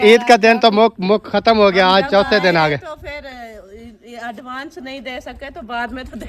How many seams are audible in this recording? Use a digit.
0